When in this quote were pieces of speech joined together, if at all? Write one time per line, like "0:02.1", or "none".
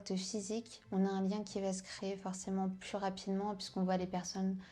none